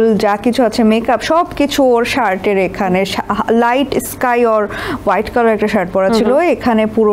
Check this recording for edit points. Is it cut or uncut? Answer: uncut